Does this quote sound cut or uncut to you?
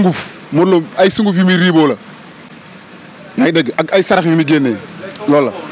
uncut